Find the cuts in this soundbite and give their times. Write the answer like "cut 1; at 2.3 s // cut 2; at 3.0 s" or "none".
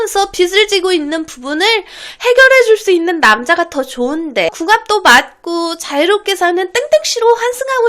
cut 1; at 4.6 s